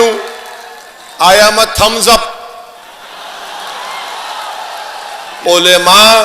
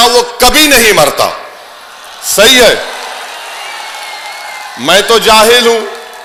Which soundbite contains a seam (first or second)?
first